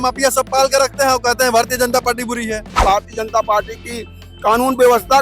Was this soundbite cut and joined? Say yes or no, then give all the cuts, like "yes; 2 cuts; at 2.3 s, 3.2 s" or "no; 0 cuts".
yes; 1 cut; at 2.8 s